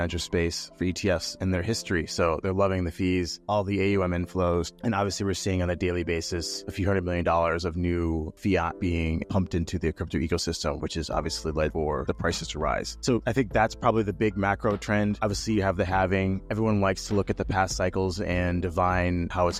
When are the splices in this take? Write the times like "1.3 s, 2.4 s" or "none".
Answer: none